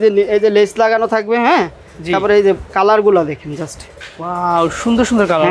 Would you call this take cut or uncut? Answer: uncut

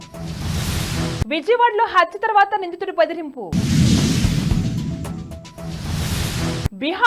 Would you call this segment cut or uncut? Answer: cut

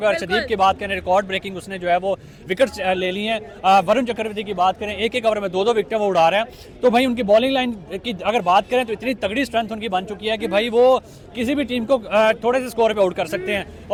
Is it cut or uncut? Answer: uncut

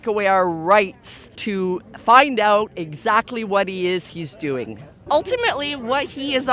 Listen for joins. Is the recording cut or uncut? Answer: cut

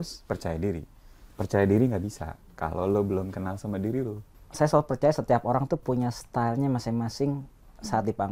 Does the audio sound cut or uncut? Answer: cut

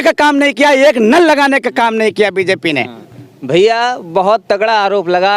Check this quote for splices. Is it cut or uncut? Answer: uncut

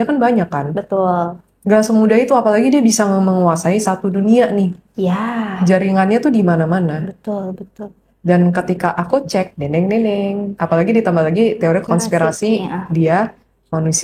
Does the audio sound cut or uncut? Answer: cut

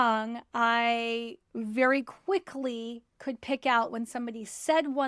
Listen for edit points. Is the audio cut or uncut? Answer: uncut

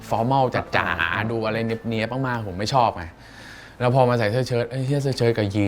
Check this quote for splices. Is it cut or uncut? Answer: uncut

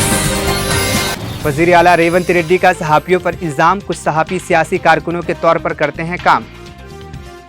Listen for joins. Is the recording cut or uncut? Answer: cut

